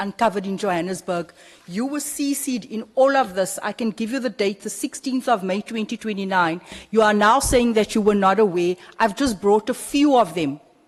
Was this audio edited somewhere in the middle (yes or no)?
no